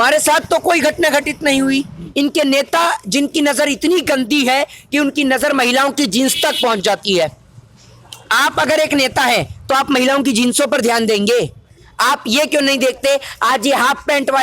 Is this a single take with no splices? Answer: no; 1 cut; at 2.0 s

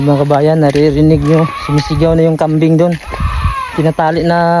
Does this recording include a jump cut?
no; 0 cuts

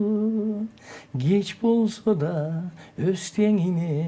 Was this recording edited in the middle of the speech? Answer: no; 0 cuts

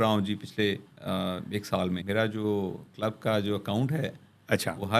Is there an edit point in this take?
yes; 1 cut; at 2.0 s

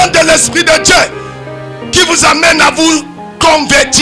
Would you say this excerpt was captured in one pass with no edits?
yes; 0 cuts

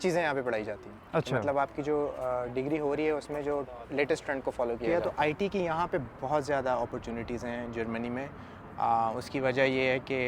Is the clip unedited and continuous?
no; 1 cut; at 4.8 s

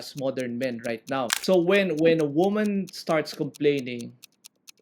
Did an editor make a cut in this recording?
yes; 1 cut; at 1.3 s

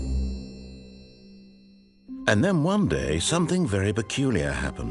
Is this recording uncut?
no; 1 cut; at 2.2 s

